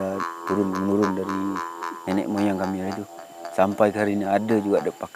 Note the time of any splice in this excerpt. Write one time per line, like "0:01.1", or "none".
none